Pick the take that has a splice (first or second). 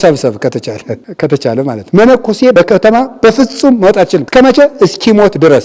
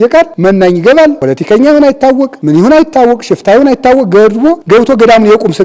first